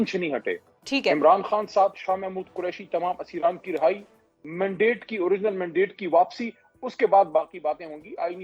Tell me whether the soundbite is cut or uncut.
uncut